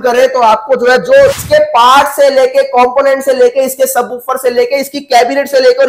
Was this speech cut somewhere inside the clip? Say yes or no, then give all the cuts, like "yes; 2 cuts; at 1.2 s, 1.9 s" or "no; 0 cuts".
yes; 1 cut; at 1.4 s